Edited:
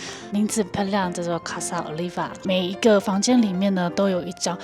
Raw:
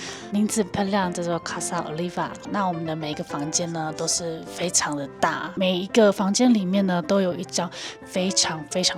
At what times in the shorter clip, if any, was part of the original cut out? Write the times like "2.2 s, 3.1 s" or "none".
2.4 s